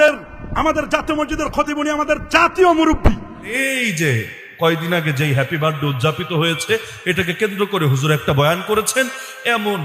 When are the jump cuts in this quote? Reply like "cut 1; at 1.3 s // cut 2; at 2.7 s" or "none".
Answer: cut 1; at 3.5 s